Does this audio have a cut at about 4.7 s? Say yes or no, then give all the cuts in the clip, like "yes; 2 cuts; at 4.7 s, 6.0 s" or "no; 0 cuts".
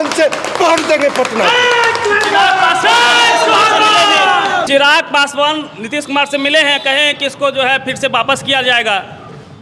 no; 0 cuts